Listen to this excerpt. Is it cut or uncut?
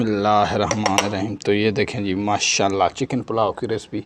uncut